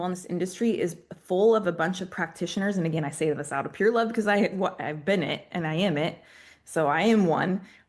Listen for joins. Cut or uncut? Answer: uncut